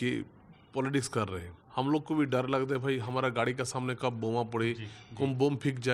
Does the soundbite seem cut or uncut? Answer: cut